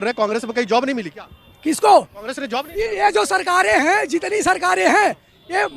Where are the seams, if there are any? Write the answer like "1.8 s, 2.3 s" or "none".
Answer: none